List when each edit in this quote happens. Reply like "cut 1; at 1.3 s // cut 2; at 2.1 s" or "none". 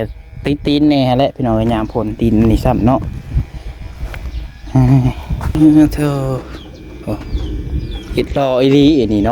cut 1; at 5.6 s